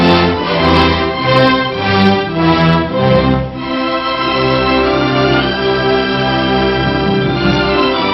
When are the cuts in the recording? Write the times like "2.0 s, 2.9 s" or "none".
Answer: none

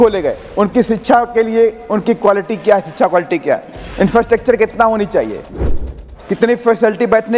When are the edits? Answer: 5.6 s

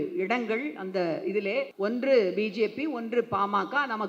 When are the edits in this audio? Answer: 1.7 s

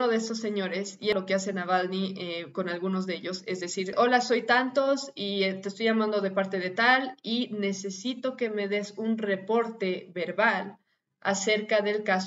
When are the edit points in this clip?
1.1 s, 3.9 s

